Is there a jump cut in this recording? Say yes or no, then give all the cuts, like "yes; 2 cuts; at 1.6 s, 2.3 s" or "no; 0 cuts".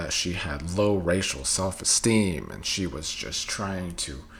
no; 0 cuts